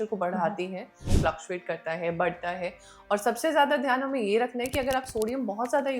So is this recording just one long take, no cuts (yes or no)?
no